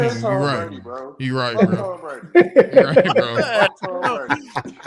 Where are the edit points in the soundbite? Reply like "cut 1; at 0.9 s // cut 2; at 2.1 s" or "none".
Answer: none